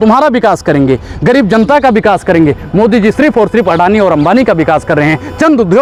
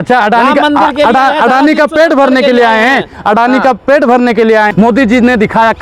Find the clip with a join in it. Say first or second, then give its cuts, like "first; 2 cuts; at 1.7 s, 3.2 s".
second; 1 cut; at 4.7 s